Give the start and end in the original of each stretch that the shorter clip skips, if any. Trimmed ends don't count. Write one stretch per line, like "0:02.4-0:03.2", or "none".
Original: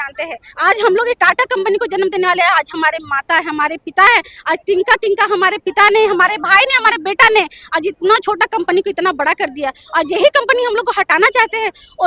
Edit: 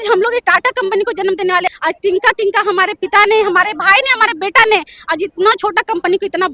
0:02.4-0:04.3